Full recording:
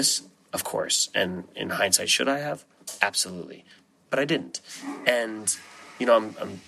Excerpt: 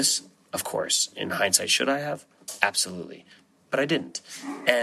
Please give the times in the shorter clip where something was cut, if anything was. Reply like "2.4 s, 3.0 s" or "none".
1.0 s